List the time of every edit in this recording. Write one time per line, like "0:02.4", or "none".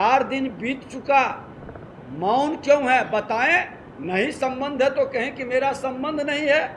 none